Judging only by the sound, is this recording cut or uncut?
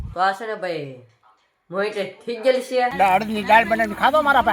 cut